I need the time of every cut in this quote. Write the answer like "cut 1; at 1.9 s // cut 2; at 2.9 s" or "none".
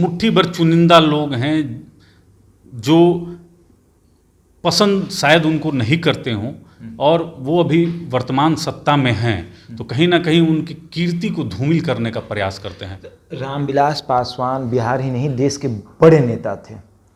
none